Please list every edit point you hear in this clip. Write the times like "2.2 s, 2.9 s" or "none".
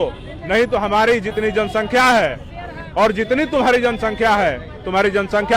none